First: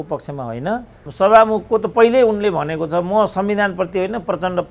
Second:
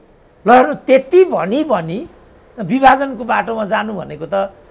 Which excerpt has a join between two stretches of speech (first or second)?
first